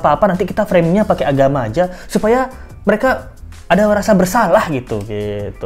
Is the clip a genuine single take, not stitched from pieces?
yes; 0 cuts

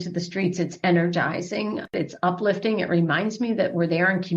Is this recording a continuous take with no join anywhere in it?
no; 1 cut; at 1.9 s

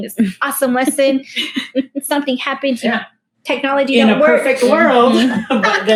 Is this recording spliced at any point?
no; 0 cuts

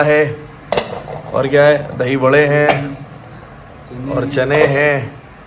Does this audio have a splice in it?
no; 0 cuts

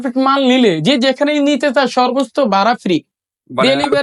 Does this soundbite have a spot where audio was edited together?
no; 0 cuts

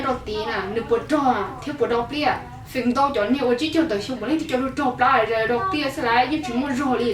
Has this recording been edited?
no; 0 cuts

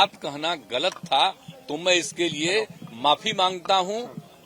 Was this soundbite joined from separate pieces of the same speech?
no; 0 cuts

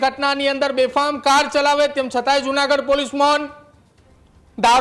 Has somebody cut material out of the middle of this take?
no; 0 cuts

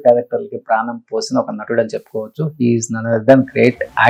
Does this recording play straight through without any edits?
yes; 0 cuts

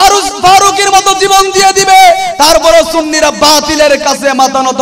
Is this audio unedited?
yes; 0 cuts

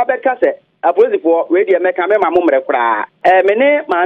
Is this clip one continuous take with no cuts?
no; 1 cut; at 3.1 s

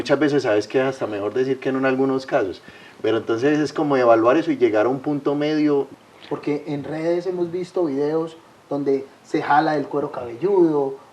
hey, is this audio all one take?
no; 1 cut; at 5.9 s

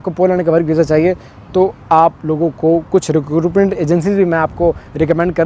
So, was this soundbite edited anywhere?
no; 0 cuts

